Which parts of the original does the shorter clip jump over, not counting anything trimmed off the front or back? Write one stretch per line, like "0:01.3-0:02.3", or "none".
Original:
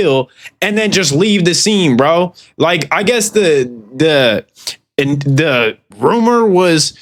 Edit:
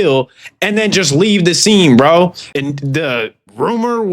0:02.4-0:04.9